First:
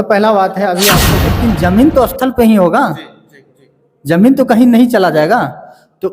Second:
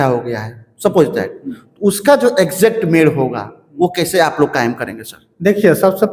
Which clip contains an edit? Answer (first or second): first